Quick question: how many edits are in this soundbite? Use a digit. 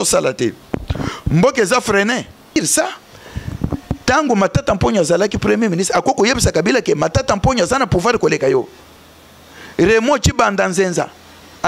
1